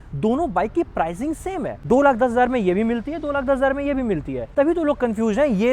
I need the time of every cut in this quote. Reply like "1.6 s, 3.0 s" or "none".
none

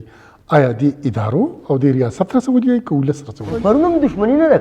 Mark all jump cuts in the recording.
3.5 s

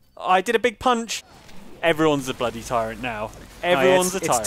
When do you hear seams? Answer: 1.3 s

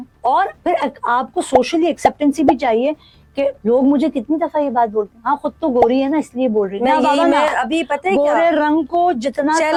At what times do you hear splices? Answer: none

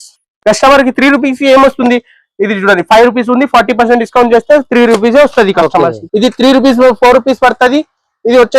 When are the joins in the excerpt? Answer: 6.0 s

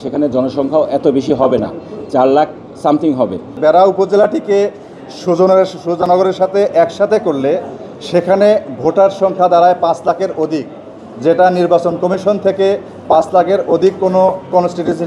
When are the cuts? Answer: 3.5 s

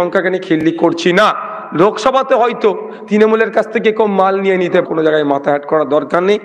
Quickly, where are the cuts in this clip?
4.8 s

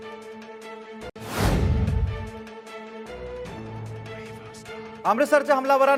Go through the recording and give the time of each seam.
none

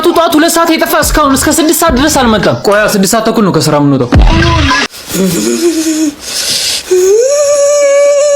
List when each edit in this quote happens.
4.9 s

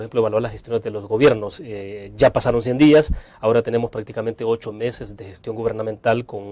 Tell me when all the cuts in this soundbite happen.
none

